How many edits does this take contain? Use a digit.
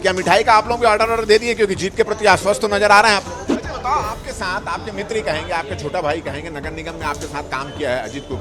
1